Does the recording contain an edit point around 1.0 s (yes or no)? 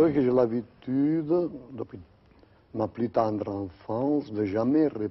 no